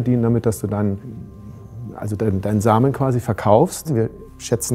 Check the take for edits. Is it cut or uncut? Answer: cut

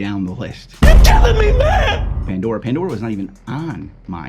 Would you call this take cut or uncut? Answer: cut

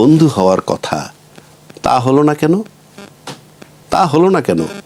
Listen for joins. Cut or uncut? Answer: uncut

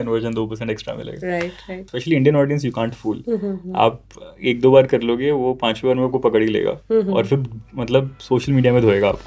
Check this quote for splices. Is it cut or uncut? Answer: cut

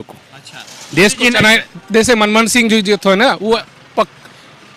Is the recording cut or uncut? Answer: uncut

